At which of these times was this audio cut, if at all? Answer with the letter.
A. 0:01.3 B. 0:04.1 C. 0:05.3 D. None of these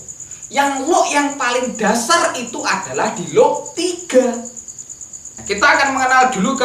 C